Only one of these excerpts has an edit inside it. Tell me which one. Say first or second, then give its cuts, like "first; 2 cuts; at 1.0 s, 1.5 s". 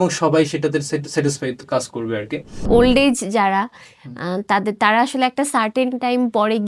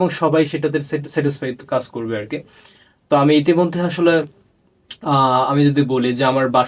first; 1 cut; at 2.7 s